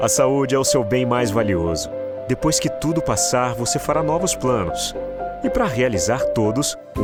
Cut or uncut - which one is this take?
uncut